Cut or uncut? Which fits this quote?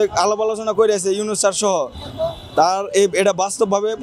uncut